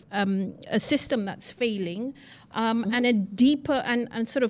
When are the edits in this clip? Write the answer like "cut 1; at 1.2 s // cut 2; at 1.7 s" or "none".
none